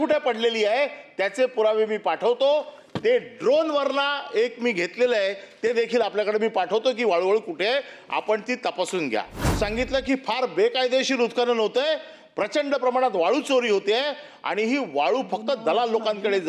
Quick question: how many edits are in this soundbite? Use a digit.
1